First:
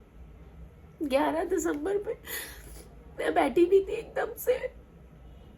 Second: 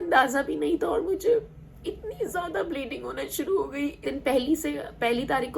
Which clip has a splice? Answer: second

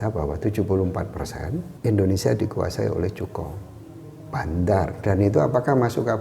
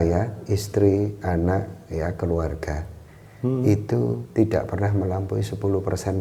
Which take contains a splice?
first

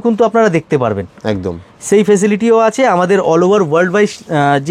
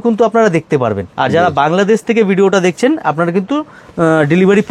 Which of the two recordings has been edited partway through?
second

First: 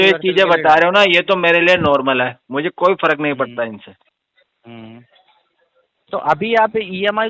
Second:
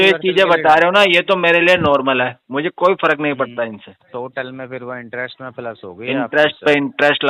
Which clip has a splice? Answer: second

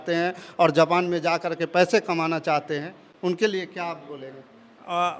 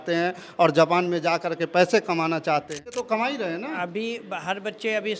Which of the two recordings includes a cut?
second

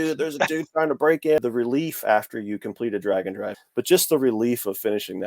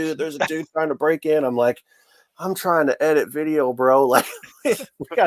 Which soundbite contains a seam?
first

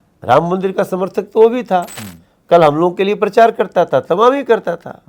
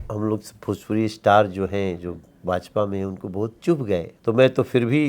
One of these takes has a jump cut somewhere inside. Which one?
second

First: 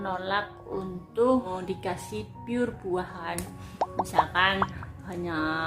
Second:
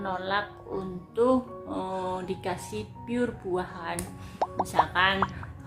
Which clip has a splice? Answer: first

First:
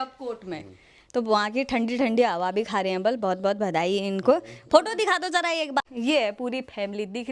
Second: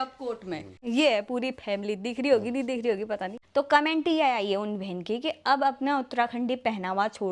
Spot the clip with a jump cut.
second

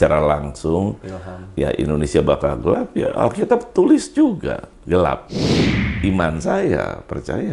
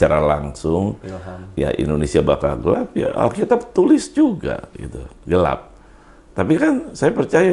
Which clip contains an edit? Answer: first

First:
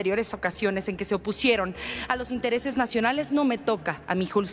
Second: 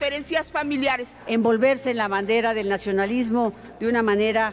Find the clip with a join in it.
second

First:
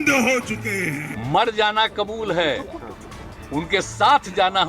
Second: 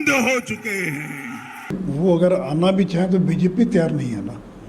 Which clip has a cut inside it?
first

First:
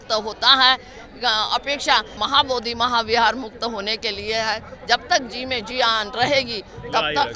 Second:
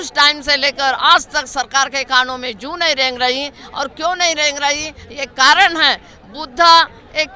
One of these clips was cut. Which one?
first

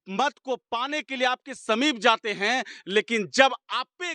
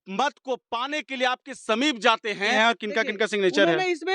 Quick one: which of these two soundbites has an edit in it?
second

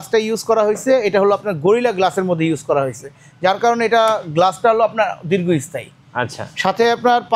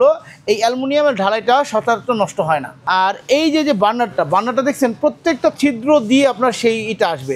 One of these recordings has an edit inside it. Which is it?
second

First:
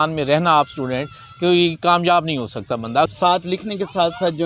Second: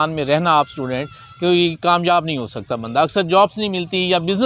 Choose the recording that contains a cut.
first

